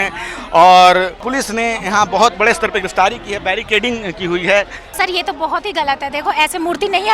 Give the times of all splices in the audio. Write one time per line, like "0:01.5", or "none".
0:01.2
0:04.9